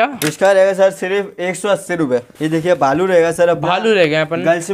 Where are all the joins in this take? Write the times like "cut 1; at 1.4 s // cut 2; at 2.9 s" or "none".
cut 1; at 2.3 s